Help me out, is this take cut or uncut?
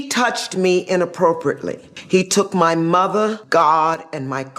cut